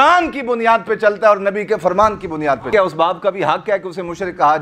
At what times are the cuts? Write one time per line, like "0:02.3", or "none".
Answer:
0:02.7

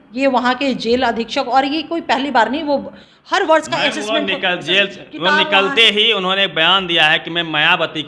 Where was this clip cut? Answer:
none

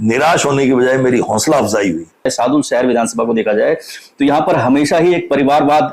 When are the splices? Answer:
0:02.3

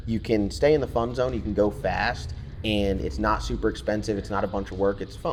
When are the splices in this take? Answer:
none

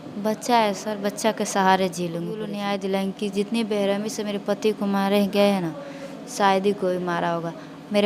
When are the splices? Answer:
0:02.5

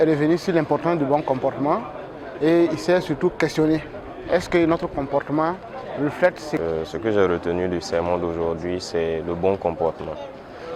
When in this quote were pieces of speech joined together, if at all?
0:06.6

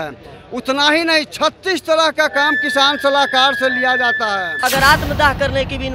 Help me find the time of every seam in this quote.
0:04.6

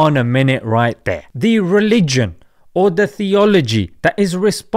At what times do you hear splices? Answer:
0:01.3

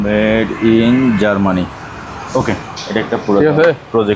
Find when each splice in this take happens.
none

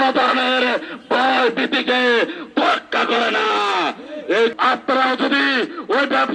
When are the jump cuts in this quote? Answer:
0:04.5

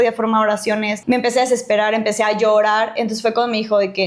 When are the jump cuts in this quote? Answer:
0:01.0

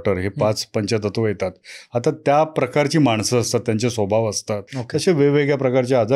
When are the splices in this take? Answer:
0:04.7

